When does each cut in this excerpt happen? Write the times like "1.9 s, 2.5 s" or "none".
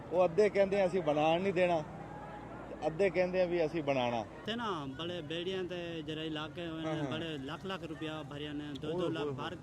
4.4 s